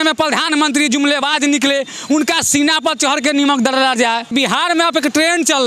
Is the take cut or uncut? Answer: cut